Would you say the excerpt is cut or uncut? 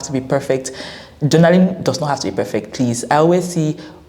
uncut